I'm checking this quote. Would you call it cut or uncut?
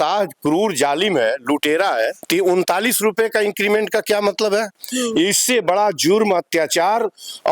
cut